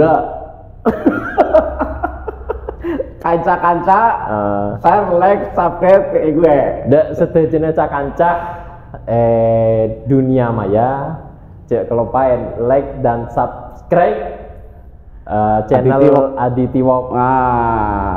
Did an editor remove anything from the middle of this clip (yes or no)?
no